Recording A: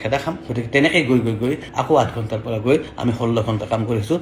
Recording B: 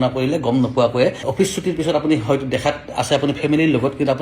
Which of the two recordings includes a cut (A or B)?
B